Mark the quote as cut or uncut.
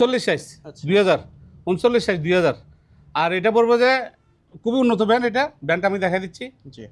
uncut